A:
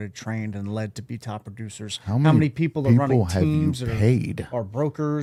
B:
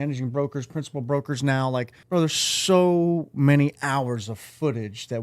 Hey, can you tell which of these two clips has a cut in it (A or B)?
B